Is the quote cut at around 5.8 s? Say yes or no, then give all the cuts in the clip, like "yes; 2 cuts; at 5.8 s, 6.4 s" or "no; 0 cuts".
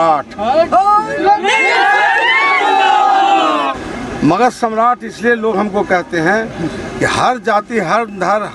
no; 1 cut; at 3.8 s